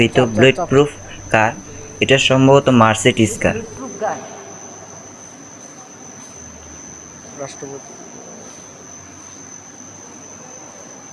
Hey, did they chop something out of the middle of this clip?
no; 0 cuts

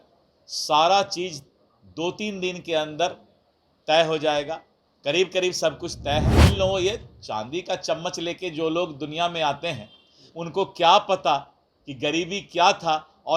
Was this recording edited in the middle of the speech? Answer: yes; 1 cut; at 6.5 s

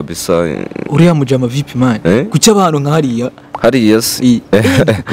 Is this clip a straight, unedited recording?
yes; 0 cuts

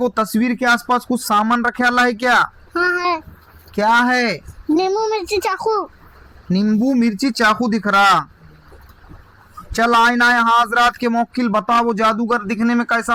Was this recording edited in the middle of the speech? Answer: no; 0 cuts

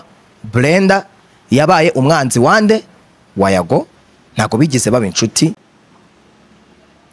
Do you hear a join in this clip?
no; 0 cuts

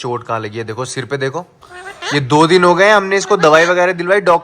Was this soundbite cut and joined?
no; 0 cuts

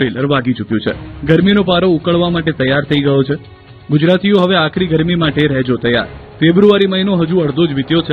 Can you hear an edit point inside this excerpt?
yes; 1 cut; at 4.9 s

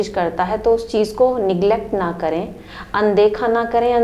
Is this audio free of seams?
yes; 0 cuts

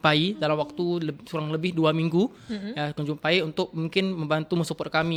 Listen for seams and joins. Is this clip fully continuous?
yes; 0 cuts

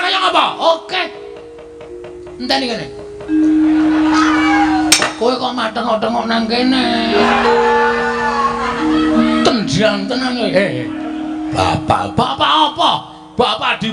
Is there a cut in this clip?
yes; 1 cut; at 7.2 s

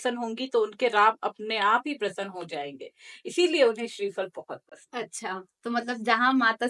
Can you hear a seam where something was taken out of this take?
no; 0 cuts

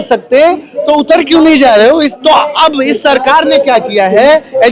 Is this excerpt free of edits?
no; 1 cut; at 2.1 s

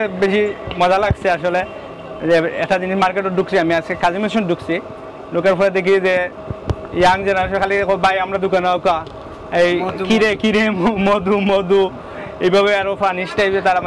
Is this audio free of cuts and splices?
yes; 0 cuts

